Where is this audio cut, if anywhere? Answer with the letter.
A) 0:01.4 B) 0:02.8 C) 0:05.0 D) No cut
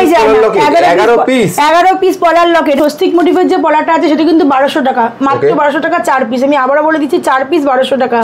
B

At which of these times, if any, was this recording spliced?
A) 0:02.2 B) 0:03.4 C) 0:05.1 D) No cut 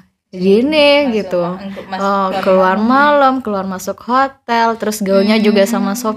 D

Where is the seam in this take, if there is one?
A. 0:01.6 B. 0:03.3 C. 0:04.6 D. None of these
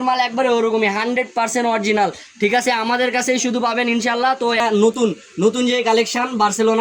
C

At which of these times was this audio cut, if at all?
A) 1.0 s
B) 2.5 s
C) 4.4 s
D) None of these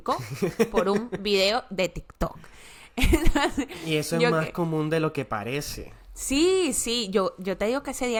D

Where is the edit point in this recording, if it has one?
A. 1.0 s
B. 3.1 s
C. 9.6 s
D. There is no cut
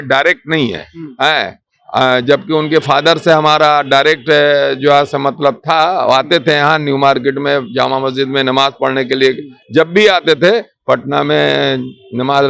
D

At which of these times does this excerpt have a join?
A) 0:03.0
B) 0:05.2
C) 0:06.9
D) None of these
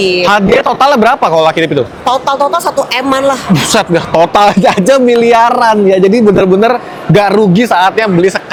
D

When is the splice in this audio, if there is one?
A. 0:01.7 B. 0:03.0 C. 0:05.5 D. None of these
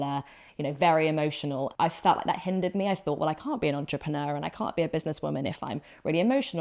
A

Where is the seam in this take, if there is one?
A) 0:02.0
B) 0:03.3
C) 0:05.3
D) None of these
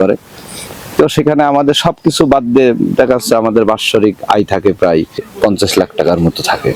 C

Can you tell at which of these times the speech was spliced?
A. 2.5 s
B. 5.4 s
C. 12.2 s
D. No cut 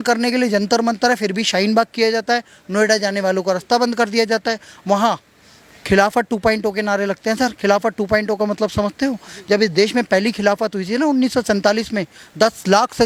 D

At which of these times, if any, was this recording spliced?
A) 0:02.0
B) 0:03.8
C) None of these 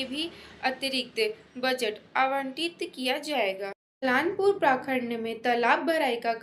B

